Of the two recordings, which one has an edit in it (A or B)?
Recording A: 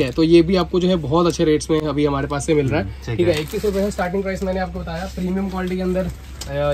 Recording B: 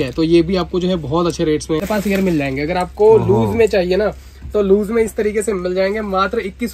B